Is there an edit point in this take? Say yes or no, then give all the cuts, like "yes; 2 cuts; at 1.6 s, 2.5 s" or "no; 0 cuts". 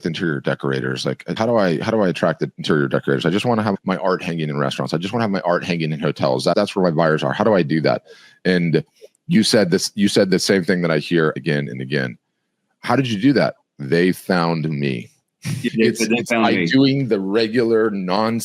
no; 0 cuts